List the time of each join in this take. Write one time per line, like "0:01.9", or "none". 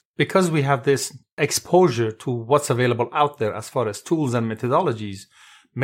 0:01.4